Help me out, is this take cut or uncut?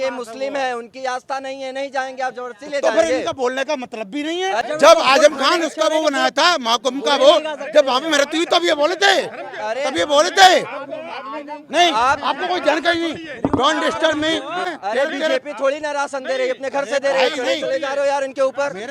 cut